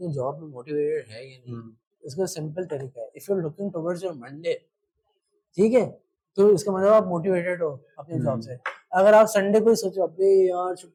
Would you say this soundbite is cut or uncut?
uncut